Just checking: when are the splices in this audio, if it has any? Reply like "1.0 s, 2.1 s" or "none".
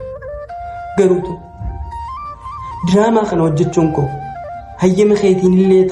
1.0 s

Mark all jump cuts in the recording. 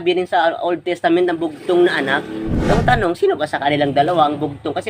2.5 s

